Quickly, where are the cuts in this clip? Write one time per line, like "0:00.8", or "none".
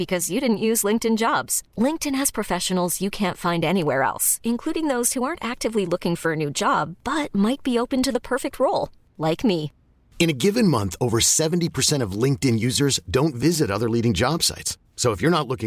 none